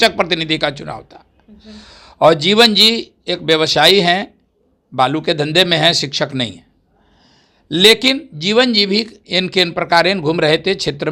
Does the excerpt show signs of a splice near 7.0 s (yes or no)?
no